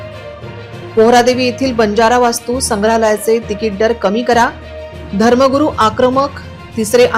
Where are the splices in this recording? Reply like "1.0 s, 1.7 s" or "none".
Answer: none